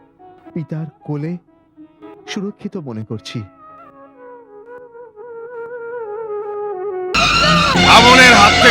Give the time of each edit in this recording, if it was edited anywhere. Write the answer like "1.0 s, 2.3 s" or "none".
7.2 s